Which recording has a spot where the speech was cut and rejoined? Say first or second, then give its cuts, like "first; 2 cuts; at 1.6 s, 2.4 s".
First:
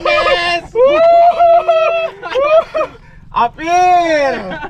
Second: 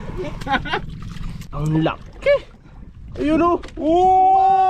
second; 1 cut; at 1.4 s